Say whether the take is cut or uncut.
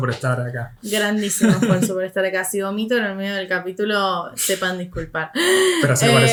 uncut